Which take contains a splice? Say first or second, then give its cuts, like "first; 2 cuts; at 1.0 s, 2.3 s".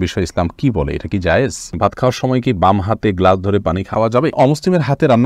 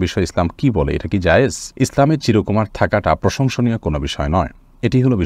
first; 2 cuts; at 1.8 s, 4.1 s